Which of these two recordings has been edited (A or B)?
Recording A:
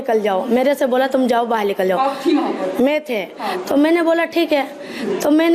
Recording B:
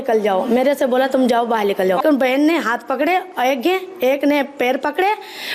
B